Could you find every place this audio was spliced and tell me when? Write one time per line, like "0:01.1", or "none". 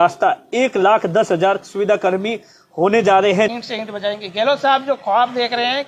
0:03.5